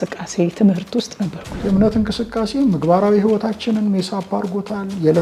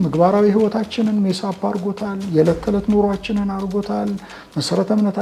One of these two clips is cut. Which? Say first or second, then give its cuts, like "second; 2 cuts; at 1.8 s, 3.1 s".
first; 1 cut; at 1.5 s